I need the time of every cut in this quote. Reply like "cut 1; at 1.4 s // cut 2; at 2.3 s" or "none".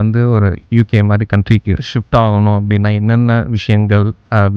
cut 1; at 1.8 s

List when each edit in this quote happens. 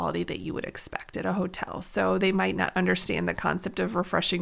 none

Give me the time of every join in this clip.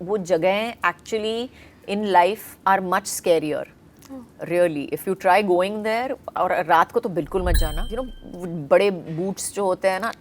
cut 1; at 7.9 s

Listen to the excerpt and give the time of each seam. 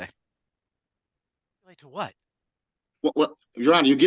cut 1; at 1.8 s

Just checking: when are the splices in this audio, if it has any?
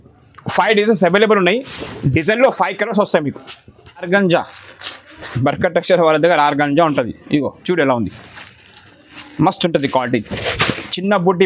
cut 1; at 3.9 s

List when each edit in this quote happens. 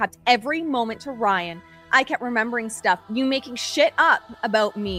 none

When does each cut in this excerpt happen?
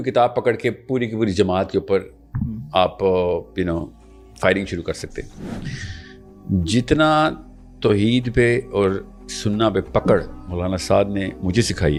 none

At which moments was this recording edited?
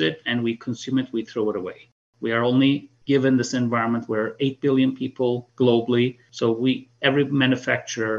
cut 1; at 2.1 s // cut 2; at 5.5 s // cut 3; at 6.2 s

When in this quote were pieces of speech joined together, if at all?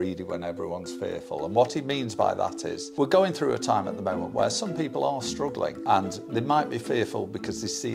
none

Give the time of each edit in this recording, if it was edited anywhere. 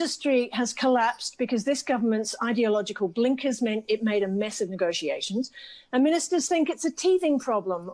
cut 1; at 1.6 s

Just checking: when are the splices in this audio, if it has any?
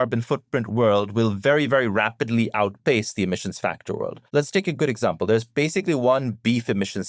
cut 1; at 4.2 s

